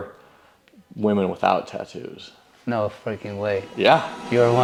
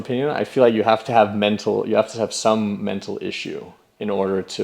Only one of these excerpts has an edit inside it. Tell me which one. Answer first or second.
second